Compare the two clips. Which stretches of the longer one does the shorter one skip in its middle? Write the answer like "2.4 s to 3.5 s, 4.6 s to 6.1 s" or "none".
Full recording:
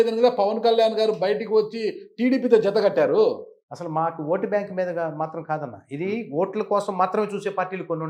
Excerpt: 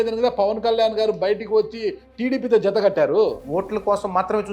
3.4 s to 6.3 s